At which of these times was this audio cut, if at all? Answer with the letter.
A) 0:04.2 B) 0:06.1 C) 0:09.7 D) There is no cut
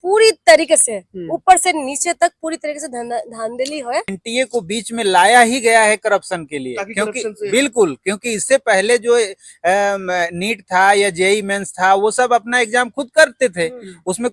A